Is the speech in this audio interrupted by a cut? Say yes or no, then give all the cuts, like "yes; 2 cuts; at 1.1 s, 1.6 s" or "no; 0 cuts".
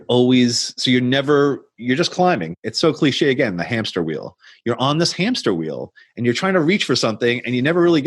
yes; 1 cut; at 2.5 s